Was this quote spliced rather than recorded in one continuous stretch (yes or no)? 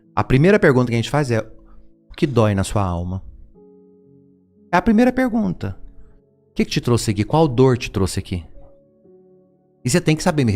no